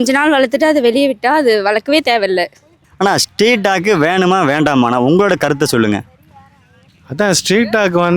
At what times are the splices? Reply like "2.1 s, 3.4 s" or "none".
none